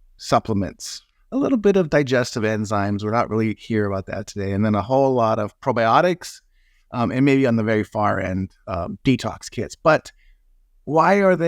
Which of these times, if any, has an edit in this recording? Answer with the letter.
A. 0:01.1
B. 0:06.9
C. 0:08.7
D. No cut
A